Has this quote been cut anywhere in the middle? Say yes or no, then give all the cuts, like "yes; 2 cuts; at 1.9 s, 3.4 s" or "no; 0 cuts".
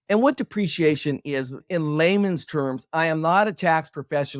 yes; 1 cut; at 1.6 s